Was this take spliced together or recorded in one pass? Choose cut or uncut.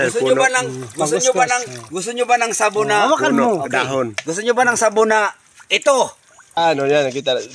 cut